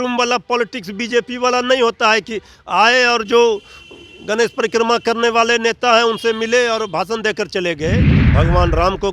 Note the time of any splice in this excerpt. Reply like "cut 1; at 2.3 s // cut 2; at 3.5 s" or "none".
cut 1; at 8.2 s